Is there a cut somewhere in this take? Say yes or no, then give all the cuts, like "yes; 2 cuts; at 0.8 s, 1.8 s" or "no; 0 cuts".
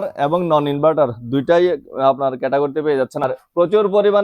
yes; 1 cut; at 3.2 s